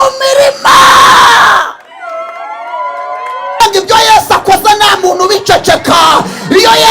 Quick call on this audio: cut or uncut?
cut